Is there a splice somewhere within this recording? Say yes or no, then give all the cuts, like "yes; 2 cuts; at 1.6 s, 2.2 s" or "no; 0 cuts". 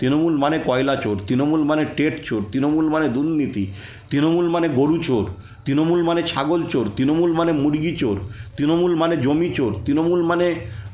no; 0 cuts